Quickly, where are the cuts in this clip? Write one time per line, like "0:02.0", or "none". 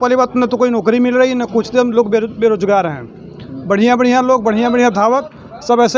none